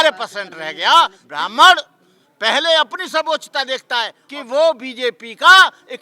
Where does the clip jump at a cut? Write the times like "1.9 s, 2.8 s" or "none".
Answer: 1.2 s, 4.2 s